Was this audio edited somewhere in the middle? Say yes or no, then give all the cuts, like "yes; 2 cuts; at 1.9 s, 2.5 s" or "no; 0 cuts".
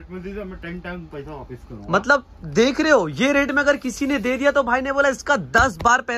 no; 0 cuts